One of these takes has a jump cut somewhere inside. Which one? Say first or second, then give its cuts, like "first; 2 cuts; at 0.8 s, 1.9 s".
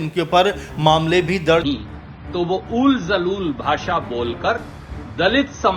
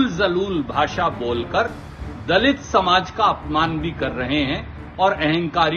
first; 1 cut; at 1.6 s